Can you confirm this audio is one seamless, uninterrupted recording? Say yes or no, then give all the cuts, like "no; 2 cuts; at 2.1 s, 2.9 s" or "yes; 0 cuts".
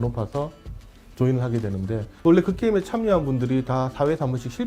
no; 1 cut; at 2.2 s